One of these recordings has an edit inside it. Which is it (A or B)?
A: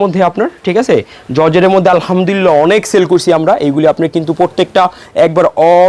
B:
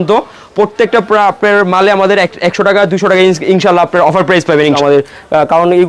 B